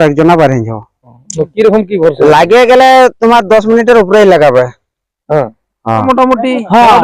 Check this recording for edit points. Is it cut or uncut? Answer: cut